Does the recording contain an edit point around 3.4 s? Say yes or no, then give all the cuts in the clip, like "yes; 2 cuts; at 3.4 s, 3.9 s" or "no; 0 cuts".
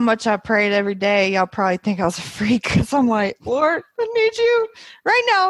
no; 0 cuts